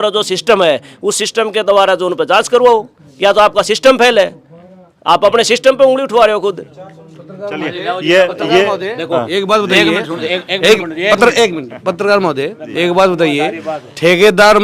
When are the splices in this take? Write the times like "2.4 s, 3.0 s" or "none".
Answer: none